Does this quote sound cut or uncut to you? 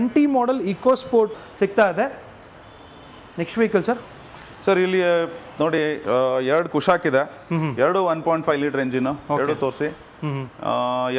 uncut